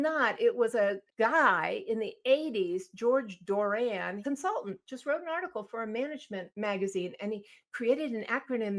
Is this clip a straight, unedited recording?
no; 3 cuts; at 1.0 s, 4.2 s, 6.5 s

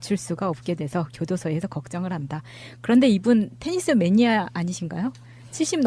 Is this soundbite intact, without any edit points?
yes; 0 cuts

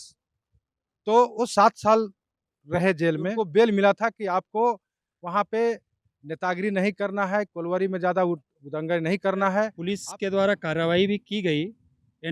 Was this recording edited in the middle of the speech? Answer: yes; 2 cuts; at 3.3 s, 9.8 s

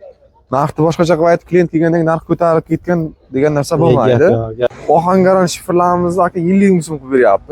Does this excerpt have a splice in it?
yes; 1 cut; at 4.8 s

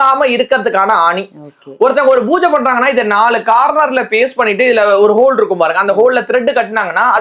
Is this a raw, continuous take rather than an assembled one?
yes; 0 cuts

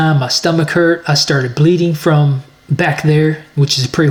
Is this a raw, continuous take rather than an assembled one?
yes; 0 cuts

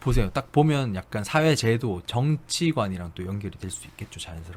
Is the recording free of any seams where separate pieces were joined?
yes; 0 cuts

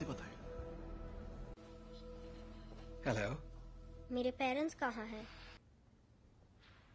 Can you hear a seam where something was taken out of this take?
yes; 1 cut; at 5.6 s

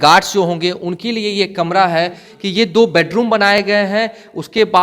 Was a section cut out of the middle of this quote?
yes; 1 cut; at 2.3 s

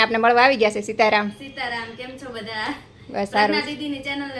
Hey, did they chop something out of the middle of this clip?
no; 0 cuts

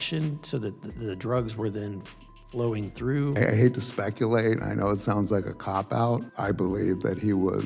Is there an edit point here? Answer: yes; 2 cuts; at 3.4 s, 6.3 s

